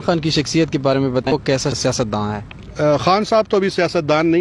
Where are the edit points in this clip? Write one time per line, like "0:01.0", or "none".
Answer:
0:01.3

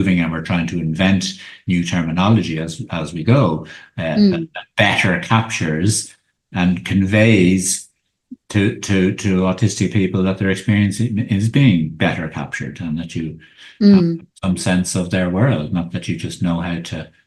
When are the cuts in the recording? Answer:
none

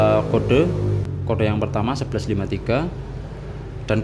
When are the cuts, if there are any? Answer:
0:01.0

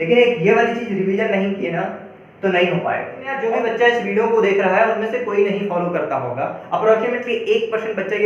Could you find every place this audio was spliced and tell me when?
0:03.4

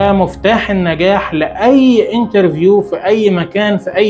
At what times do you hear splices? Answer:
none

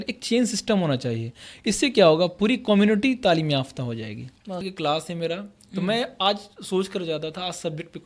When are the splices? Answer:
0:04.7

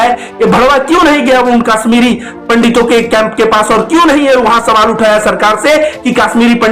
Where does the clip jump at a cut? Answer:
none

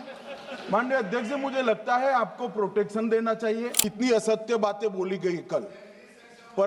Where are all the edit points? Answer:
0:03.8

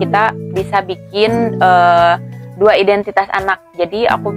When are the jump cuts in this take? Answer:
none

